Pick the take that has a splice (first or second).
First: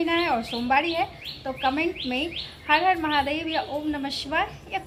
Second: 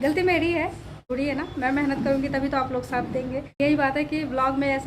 second